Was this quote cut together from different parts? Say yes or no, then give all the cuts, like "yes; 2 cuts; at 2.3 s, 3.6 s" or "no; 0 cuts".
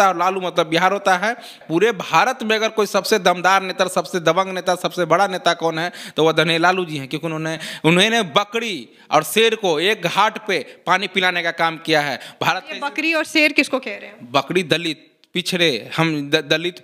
yes; 1 cut; at 1.5 s